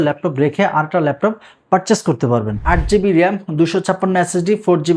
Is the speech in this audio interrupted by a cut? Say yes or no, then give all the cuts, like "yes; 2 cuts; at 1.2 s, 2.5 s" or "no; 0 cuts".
yes; 1 cut; at 2.6 s